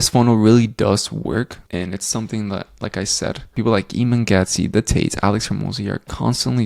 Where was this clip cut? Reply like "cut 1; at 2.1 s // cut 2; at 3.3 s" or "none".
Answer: none

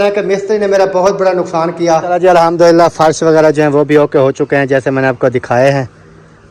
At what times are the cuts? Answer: cut 1; at 2.1 s

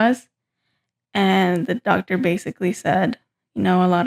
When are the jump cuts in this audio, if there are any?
none

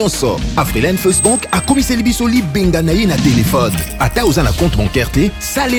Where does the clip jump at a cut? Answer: none

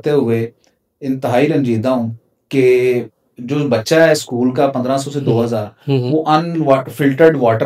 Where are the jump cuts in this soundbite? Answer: none

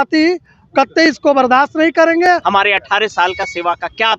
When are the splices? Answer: cut 1; at 2.4 s

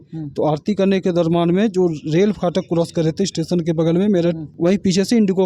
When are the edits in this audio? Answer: cut 1; at 4.5 s

